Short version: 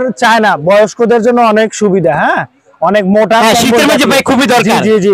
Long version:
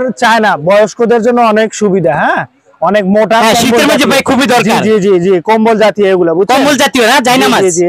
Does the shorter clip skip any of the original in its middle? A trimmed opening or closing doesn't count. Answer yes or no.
no